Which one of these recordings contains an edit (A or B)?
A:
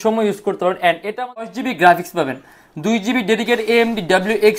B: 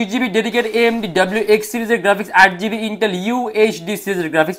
A